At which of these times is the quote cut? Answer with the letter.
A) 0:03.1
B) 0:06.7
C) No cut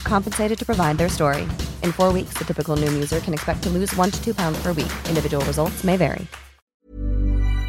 B